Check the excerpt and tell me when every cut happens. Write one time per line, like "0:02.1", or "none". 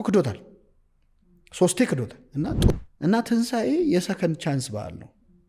0:02.7